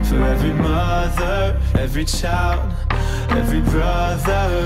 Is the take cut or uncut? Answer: uncut